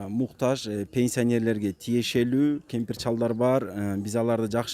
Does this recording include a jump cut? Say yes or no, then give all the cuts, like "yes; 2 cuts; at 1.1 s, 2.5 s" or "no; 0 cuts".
yes; 1 cut; at 2.7 s